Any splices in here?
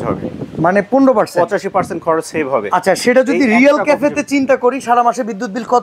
no; 0 cuts

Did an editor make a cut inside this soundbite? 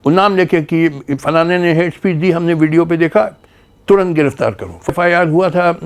yes; 1 cut; at 4.9 s

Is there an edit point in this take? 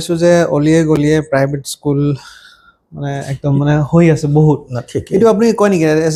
no; 0 cuts

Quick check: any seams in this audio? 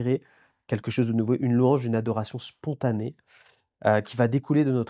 no; 0 cuts

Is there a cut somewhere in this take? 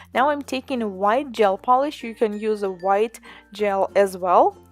no; 0 cuts

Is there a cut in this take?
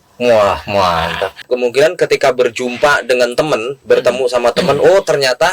yes; 1 cut; at 1.4 s

